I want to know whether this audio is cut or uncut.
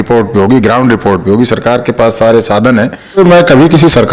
cut